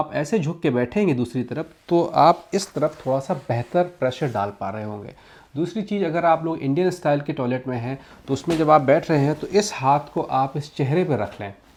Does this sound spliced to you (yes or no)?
no